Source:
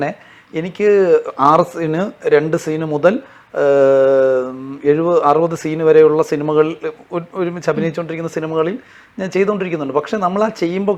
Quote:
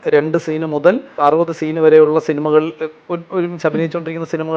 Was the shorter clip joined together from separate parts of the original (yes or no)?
yes